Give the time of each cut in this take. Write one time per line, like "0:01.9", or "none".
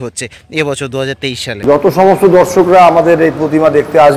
0:01.8